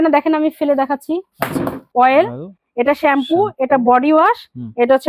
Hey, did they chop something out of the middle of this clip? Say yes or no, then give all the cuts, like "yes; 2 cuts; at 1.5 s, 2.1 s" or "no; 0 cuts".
yes; 1 cut; at 1.8 s